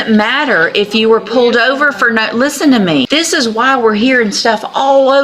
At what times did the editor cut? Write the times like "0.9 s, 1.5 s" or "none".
3.1 s